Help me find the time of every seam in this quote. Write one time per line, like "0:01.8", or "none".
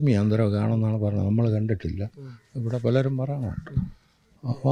none